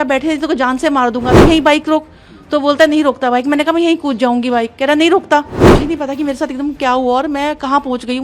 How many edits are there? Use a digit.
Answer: 2